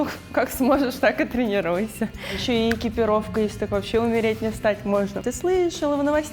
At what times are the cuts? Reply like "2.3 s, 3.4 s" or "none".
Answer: 2.4 s, 5.2 s